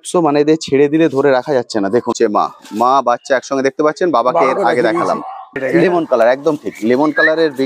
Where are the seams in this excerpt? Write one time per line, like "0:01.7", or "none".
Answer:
0:02.1
0:05.5